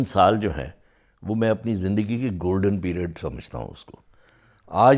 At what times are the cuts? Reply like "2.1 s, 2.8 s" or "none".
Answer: none